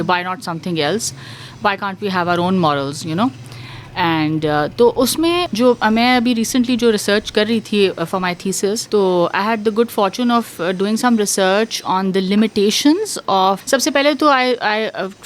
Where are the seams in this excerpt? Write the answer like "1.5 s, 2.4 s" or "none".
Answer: 5.5 s, 8.8 s, 13.6 s